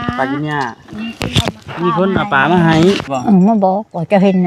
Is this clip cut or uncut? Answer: cut